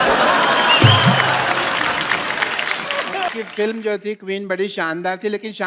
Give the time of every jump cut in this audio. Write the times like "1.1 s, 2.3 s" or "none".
3.3 s

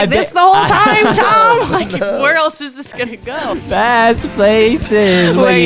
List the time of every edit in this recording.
3.4 s

